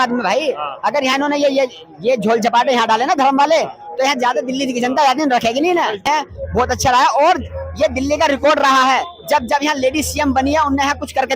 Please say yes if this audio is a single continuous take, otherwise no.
no